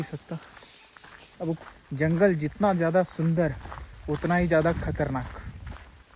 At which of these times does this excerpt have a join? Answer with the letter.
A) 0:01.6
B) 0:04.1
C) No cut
A